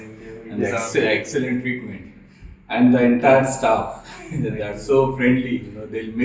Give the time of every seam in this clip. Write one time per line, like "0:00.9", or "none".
none

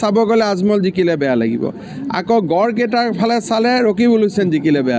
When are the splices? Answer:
none

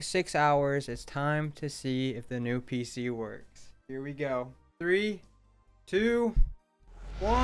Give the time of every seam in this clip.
none

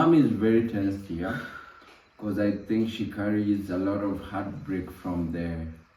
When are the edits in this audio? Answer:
none

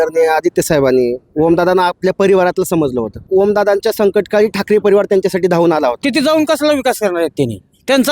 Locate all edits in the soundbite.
0:03.2
0:06.0

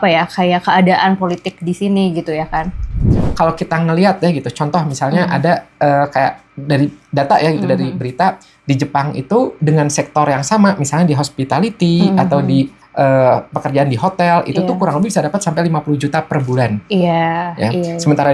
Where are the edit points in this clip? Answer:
0:03.0

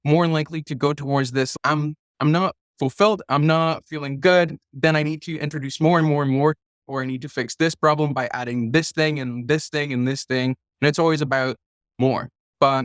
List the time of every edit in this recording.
0:01.5
0:06.9

